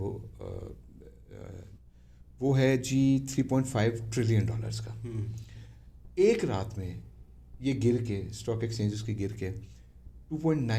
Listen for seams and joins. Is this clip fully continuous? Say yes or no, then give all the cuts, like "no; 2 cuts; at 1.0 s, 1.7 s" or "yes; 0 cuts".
yes; 0 cuts